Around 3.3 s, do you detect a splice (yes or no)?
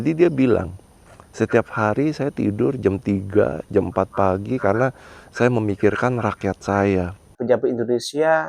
no